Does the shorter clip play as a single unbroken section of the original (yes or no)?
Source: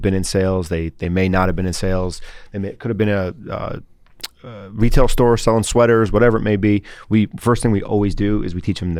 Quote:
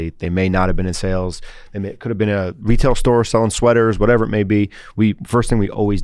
no